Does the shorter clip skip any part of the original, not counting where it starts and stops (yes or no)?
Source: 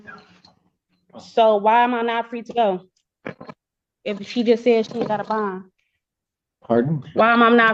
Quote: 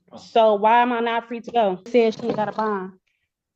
yes